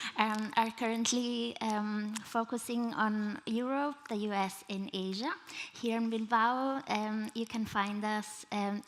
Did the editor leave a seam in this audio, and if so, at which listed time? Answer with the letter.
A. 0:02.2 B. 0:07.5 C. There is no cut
C